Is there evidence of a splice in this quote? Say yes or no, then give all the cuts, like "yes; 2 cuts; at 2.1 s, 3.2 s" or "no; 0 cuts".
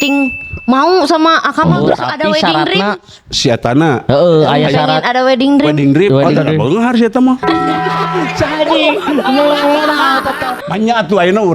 yes; 1 cut; at 10.6 s